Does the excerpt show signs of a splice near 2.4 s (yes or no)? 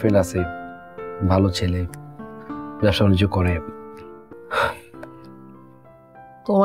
no